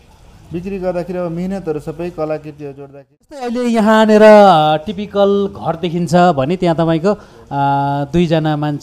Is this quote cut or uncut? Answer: cut